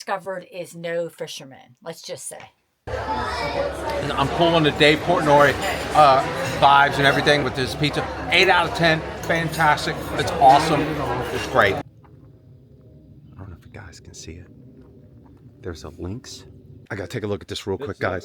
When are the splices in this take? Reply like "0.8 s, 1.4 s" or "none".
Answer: 2.9 s, 11.8 s, 16.8 s

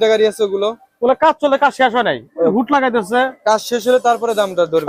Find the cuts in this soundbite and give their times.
none

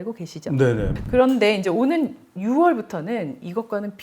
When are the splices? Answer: 0.9 s

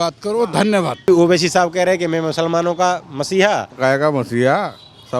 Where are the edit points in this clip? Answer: 1.1 s, 3.7 s

